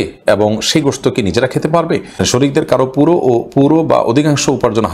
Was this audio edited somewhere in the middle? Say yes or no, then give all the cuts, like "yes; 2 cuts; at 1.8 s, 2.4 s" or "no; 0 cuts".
yes; 1 cut; at 2.2 s